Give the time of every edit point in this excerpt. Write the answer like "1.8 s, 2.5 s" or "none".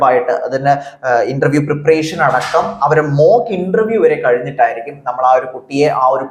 none